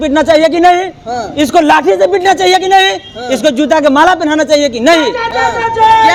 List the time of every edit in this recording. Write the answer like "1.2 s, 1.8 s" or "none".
none